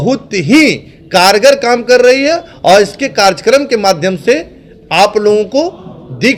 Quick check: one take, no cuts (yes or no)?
yes